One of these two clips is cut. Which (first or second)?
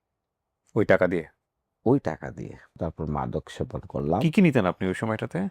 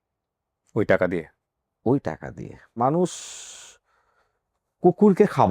second